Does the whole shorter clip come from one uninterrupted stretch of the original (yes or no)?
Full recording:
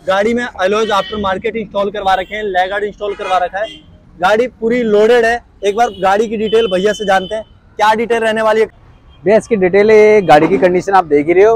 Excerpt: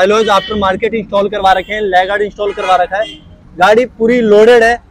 yes